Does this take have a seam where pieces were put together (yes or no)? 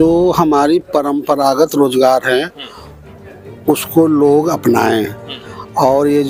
no